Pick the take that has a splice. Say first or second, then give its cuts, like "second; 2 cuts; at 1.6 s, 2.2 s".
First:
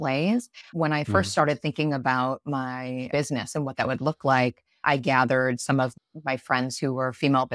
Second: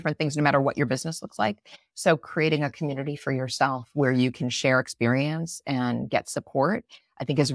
first; 2 cuts; at 3.1 s, 5.9 s